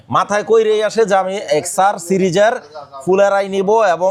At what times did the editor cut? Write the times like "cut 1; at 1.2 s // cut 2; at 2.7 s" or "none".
none